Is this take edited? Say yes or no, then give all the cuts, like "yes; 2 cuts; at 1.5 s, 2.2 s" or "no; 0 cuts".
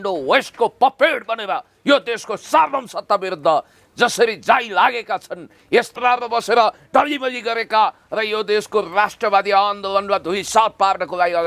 yes; 1 cut; at 5.9 s